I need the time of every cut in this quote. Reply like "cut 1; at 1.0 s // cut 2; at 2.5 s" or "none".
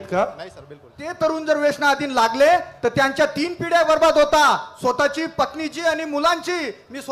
cut 1; at 1.0 s